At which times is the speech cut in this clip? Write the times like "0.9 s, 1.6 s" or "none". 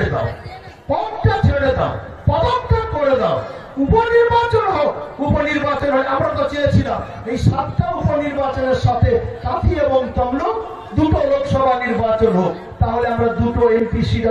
none